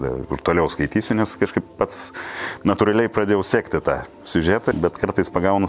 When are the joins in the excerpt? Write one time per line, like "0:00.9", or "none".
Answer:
0:04.7